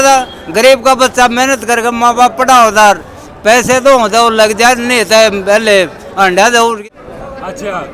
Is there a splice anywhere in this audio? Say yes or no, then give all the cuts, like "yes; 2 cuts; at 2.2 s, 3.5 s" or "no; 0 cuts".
yes; 1 cut; at 6.8 s